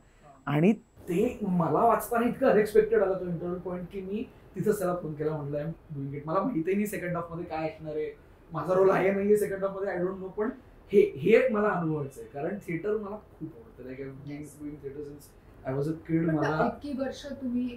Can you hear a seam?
no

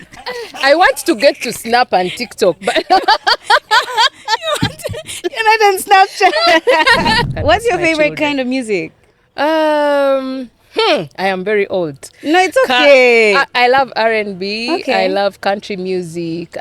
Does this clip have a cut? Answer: yes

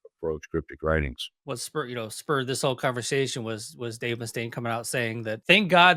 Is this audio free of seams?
yes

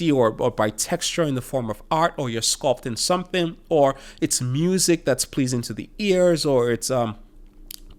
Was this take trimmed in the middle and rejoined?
no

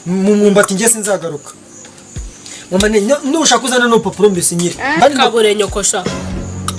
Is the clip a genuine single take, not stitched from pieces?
no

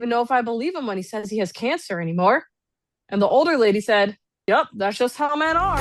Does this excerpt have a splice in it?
no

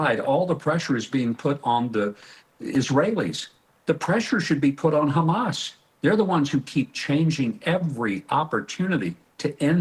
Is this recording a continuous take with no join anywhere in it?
yes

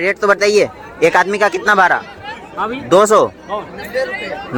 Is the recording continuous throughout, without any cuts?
yes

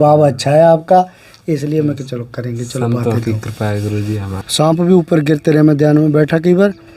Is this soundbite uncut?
no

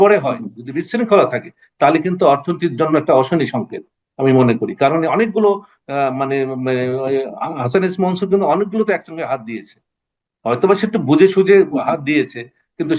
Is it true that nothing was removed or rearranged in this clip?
yes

